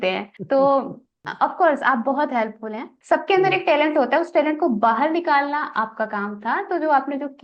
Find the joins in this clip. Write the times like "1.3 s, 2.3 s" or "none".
2.9 s